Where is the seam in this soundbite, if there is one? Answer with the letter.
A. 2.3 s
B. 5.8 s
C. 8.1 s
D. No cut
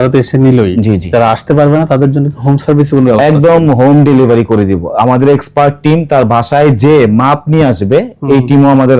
D